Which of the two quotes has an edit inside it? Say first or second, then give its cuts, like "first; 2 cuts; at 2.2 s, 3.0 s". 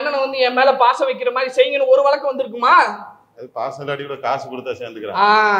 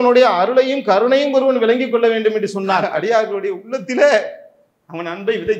second; 1 cut; at 2.9 s